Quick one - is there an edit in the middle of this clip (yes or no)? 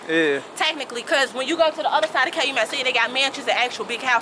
no